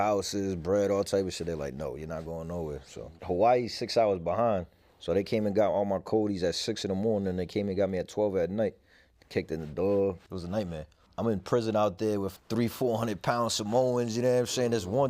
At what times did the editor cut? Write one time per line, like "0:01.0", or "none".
0:03.1
0:10.2
0:11.0
0:12.3